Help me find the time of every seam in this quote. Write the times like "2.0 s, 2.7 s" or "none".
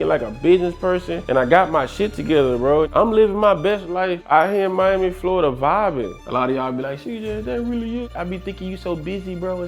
2.9 s, 6.1 s, 8.1 s